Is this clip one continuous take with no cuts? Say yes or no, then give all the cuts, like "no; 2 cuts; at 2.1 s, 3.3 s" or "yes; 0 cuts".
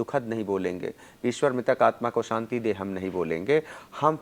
yes; 0 cuts